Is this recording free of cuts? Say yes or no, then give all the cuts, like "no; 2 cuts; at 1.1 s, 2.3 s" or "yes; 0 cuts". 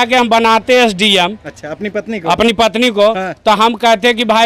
yes; 0 cuts